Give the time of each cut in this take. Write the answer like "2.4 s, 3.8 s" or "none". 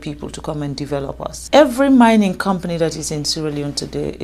1.4 s